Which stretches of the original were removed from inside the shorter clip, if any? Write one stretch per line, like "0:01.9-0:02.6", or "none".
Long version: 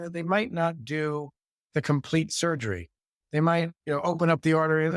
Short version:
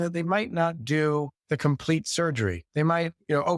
0:01.4-0:01.6
0:02.9-0:03.2